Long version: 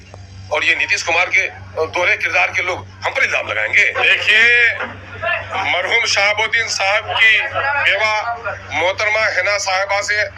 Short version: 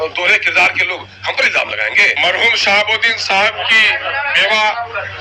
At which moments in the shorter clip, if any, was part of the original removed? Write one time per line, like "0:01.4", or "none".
0:02.2